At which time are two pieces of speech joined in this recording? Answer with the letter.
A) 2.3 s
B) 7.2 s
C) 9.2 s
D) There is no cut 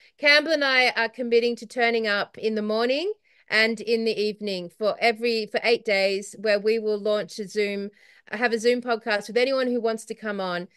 A